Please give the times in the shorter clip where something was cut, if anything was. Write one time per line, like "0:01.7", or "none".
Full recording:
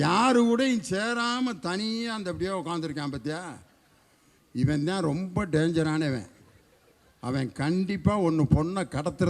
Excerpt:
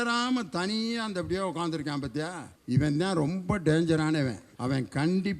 0:02.5
0:04.5